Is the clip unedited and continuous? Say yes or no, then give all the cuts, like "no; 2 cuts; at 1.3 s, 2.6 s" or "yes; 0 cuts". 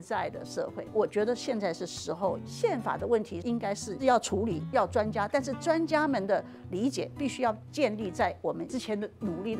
no; 1 cut; at 2.4 s